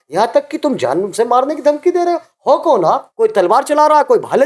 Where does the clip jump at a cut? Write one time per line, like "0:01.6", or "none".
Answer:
0:03.1